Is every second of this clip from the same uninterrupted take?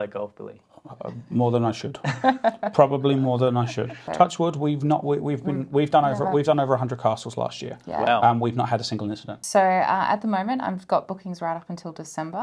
no; 2 cuts; at 4.0 s, 9.3 s

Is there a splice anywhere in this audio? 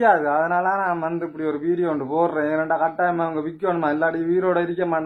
no; 0 cuts

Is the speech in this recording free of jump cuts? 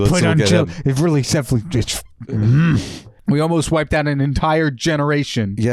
no; 1 cut; at 3.1 s

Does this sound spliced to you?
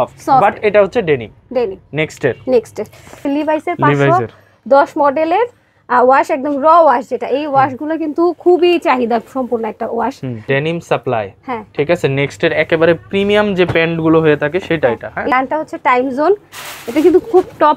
yes; 3 cuts; at 3.2 s, 10.4 s, 15.3 s

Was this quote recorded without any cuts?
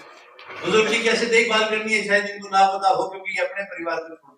yes; 0 cuts

